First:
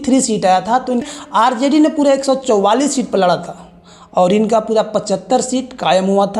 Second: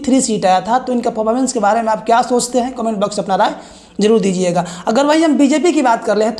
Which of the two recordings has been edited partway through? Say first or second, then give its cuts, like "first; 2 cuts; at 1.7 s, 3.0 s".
first; 1 cut; at 1.1 s